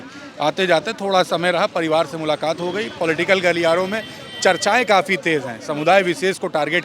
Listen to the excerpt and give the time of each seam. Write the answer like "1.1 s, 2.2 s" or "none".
none